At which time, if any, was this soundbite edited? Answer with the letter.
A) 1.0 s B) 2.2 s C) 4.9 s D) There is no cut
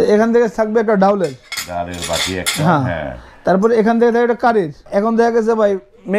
C